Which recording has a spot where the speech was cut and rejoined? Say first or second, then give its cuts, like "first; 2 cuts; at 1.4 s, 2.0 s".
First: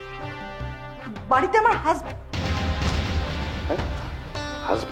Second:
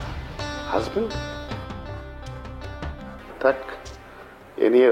second; 1 cut; at 3.2 s